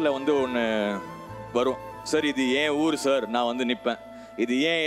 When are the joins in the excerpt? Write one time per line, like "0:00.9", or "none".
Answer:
none